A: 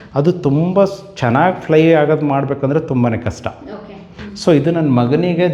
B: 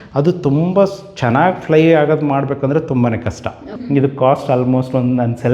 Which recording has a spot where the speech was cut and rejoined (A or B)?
B